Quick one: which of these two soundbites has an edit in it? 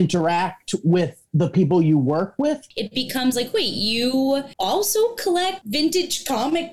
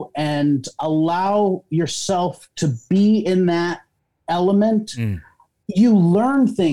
first; 3 cuts; at 2.7 s, 4.5 s, 5.6 s

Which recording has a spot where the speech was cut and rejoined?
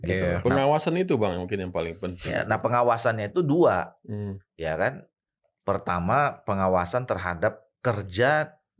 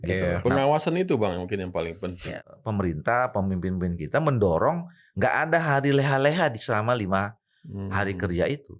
second; 1 cut; at 2.4 s

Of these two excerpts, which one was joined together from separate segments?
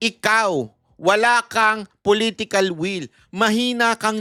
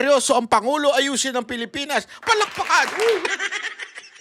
second; 1 cut; at 3.2 s

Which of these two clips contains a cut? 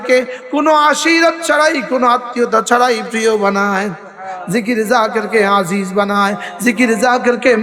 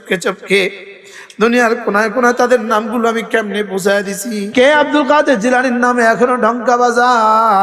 second; 1 cut; at 4.4 s

